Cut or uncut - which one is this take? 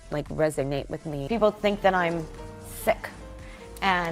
cut